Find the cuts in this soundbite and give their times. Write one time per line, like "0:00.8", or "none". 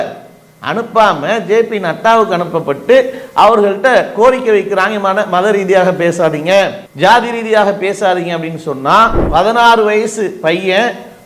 0:09.2